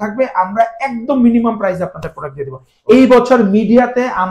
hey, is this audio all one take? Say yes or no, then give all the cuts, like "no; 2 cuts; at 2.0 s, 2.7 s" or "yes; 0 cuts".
yes; 0 cuts